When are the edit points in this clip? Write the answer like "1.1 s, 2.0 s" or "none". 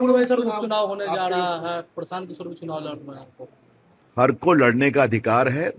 none